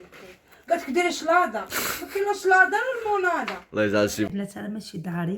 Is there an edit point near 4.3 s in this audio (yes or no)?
yes